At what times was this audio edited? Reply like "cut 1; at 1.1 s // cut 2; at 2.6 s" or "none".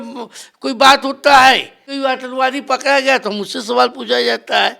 cut 1; at 1.9 s